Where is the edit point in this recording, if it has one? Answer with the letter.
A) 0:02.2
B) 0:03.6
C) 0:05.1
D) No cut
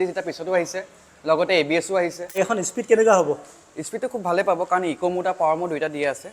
A